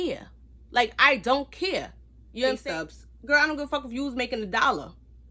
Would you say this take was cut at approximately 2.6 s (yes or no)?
yes